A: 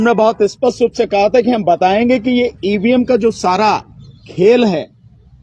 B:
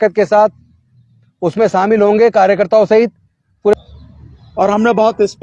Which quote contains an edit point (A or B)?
B